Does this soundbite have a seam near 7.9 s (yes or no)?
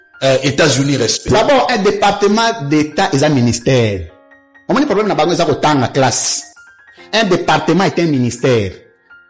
no